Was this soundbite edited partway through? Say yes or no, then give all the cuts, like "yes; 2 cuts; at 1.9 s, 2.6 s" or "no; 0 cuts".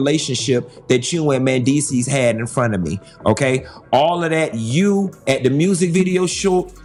no; 0 cuts